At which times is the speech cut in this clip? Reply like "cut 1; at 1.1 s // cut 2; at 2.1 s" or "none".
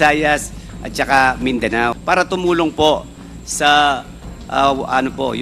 cut 1; at 2.0 s